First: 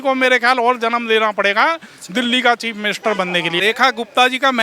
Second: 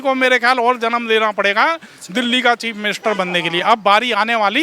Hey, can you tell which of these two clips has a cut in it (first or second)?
first